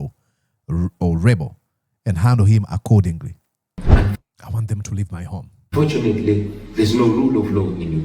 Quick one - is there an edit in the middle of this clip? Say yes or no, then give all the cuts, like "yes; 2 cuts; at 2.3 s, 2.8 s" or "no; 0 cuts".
yes; 1 cut; at 3.9 s